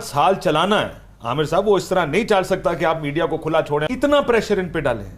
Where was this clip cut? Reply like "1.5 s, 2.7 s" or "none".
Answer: 3.8 s